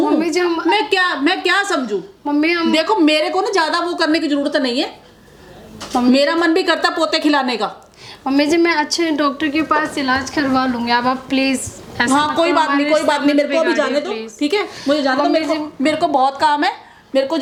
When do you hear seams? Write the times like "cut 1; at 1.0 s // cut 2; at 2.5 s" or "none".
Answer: none

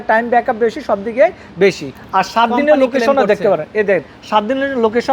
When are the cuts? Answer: cut 1; at 1.9 s

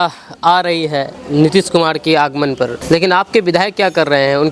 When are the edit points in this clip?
cut 1; at 1.2 s // cut 2; at 2.8 s

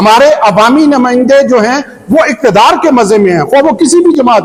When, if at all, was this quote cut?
none

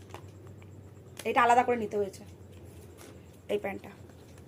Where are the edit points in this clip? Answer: none

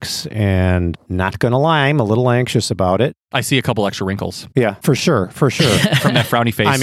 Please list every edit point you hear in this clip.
none

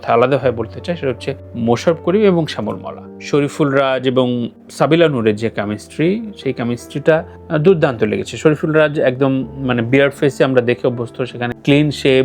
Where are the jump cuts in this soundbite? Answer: cut 1; at 3.2 s

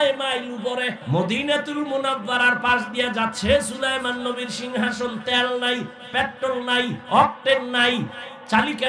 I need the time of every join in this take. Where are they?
cut 1; at 1.0 s

